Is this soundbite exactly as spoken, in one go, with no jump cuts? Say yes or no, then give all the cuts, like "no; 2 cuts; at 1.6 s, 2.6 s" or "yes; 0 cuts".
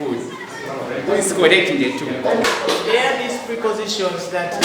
no; 1 cut; at 2.4 s